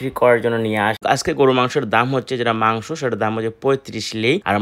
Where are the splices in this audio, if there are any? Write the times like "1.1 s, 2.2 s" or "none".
1.0 s